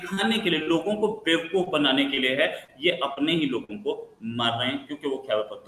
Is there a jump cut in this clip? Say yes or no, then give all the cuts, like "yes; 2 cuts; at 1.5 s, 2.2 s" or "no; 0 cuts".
no; 0 cuts